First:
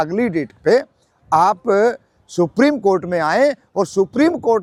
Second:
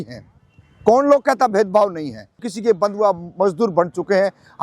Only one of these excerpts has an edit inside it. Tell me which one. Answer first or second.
second